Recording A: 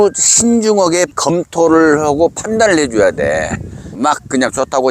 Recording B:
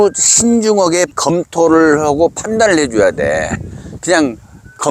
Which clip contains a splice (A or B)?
A